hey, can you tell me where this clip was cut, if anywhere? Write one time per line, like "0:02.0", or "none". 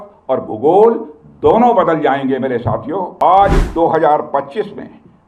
0:03.1